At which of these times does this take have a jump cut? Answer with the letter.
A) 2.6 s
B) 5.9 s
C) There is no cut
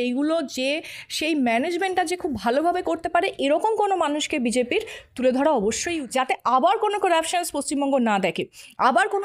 B